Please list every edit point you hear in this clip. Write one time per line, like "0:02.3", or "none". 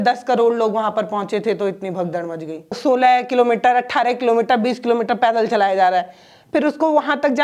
0:02.8